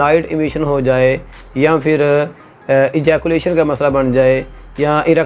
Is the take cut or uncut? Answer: uncut